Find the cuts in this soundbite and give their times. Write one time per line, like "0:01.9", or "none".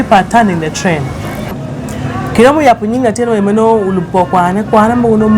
0:01.6